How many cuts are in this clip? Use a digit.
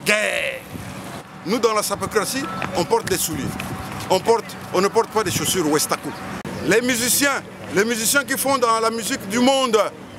2